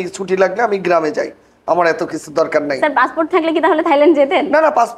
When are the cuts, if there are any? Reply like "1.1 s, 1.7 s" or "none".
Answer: none